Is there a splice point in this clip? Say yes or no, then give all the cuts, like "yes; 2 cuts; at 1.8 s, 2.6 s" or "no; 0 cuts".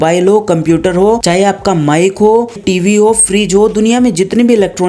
yes; 2 cuts; at 1.2 s, 2.6 s